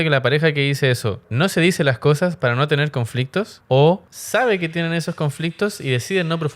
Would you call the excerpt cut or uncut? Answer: cut